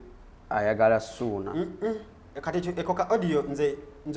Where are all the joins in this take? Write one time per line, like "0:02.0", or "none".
none